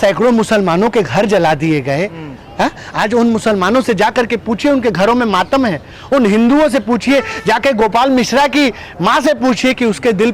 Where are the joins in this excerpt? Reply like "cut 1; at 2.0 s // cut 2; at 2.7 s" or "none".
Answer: none